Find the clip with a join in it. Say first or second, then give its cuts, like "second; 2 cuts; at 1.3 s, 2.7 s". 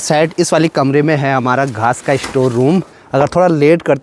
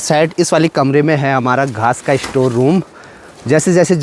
first; 1 cut; at 3.0 s